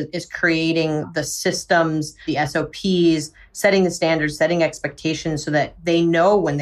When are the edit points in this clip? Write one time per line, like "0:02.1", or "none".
0:02.1

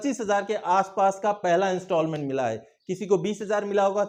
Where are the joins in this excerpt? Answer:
none

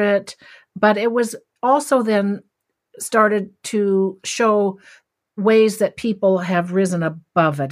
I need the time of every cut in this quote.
0:04.2

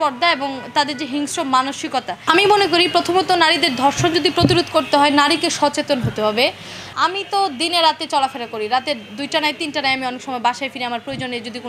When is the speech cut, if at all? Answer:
0:02.1
0:06.8

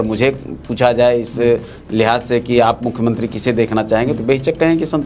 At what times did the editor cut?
none

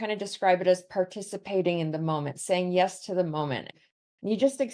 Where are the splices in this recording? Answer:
0:03.7

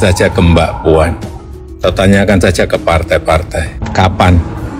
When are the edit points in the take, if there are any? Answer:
0:03.8

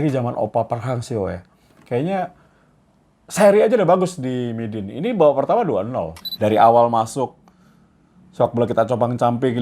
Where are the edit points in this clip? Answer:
0:06.2

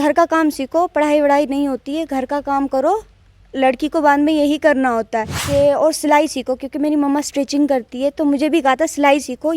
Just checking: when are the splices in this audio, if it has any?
0:05.4

